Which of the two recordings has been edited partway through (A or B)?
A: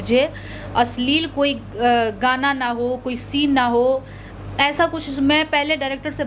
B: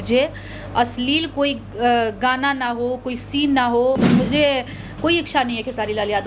B